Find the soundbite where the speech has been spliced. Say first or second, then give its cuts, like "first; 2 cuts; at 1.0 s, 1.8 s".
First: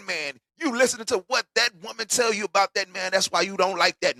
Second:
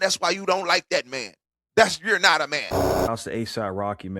second; 1 cut; at 3.1 s